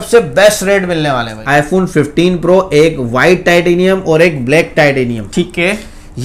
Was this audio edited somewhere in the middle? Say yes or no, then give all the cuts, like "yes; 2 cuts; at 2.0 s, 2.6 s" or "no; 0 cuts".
yes; 1 cut; at 1.3 s